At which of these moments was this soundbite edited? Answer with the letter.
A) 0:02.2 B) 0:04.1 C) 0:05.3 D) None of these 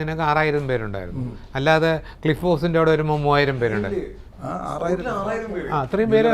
D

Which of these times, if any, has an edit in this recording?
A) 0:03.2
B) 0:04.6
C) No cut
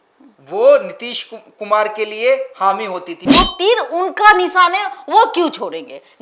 A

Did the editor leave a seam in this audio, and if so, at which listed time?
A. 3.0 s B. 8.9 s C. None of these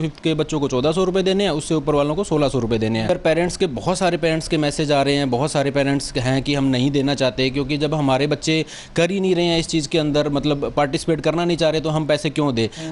A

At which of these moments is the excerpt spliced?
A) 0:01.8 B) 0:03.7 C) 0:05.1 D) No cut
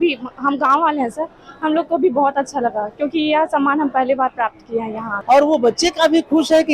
C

